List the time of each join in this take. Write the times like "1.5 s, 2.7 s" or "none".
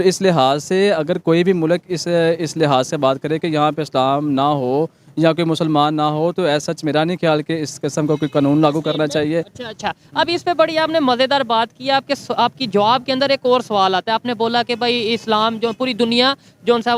none